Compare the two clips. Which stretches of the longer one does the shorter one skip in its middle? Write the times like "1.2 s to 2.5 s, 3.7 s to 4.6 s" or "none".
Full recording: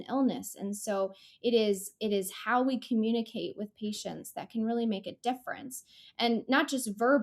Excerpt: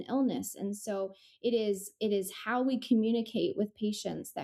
none